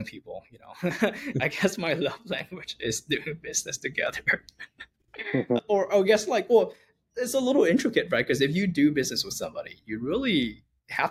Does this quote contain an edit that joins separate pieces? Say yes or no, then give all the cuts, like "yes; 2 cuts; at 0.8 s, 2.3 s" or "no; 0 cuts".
no; 0 cuts